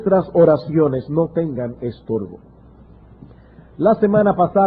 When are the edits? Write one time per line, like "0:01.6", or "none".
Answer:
0:03.7